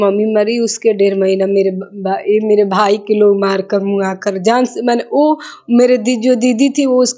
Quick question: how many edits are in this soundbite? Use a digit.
0